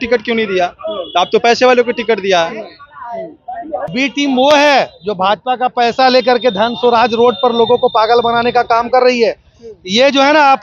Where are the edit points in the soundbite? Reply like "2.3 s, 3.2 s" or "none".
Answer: 3.9 s